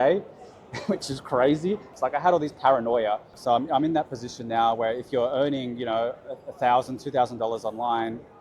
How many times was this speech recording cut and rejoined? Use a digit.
2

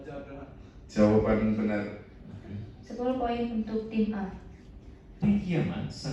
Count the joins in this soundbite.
1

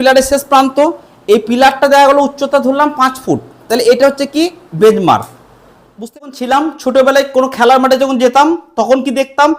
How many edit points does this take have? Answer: 1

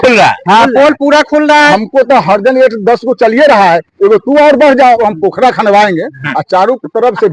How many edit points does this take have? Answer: 2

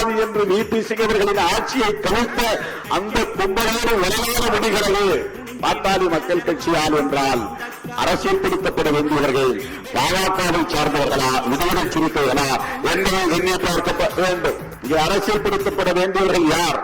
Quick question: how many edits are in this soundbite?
1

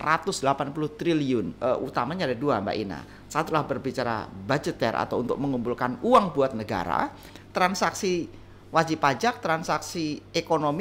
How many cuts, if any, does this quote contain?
2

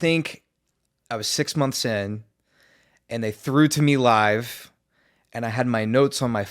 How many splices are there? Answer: 1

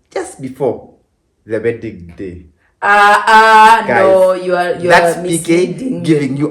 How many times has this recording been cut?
0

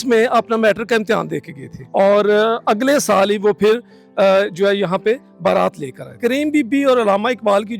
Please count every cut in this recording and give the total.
2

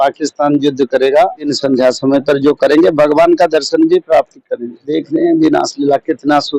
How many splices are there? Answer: 2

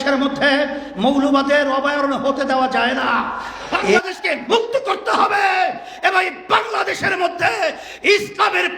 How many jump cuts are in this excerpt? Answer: 1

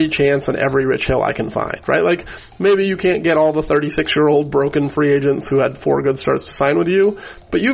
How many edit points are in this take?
0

